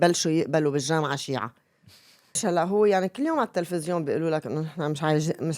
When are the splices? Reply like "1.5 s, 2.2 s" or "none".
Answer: 2.4 s